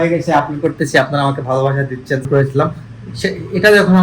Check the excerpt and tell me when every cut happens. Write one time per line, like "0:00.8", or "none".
0:02.3